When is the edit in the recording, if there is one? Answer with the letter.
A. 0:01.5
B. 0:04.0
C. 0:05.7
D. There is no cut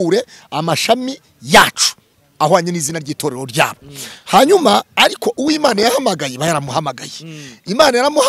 D